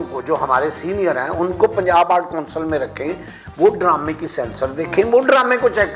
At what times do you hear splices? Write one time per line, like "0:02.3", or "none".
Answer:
none